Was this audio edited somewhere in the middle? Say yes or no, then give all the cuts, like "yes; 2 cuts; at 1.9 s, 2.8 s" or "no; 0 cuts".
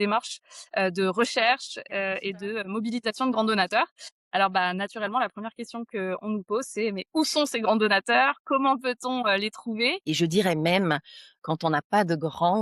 yes; 1 cut; at 10.0 s